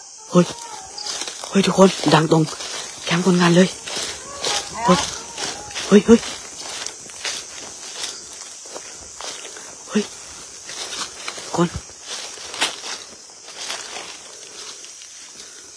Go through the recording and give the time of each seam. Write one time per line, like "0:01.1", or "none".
none